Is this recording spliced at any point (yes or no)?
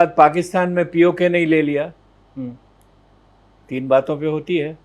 no